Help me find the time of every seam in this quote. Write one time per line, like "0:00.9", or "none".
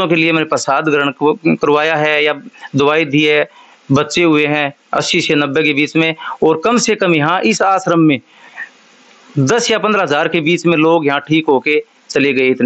none

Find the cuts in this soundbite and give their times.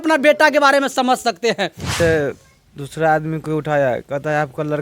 0:01.9

